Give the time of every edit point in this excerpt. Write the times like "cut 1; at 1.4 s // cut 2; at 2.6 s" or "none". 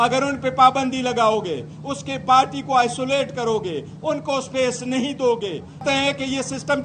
cut 1; at 5.8 s